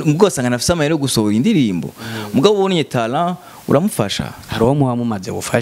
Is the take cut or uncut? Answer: uncut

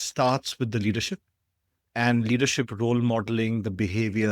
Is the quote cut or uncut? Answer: uncut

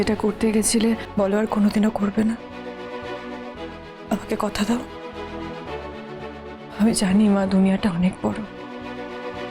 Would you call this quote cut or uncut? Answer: cut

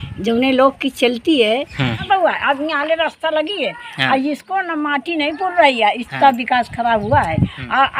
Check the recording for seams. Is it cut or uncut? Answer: cut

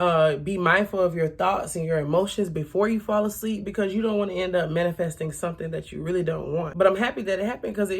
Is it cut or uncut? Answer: cut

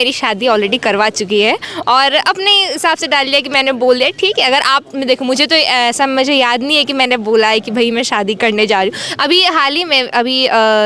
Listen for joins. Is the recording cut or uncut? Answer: uncut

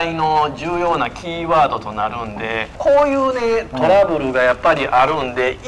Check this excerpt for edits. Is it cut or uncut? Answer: cut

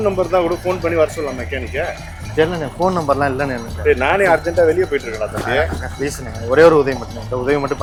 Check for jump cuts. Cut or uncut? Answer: uncut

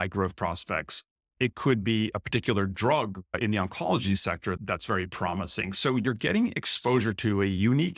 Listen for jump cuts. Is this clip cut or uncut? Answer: cut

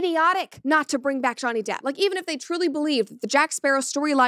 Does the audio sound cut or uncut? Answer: uncut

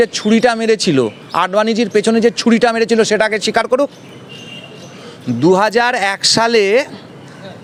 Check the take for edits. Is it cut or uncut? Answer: uncut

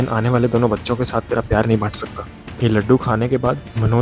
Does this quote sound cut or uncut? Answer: uncut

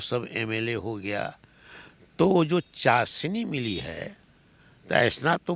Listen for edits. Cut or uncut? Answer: uncut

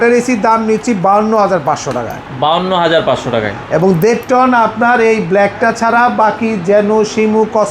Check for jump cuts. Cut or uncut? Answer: uncut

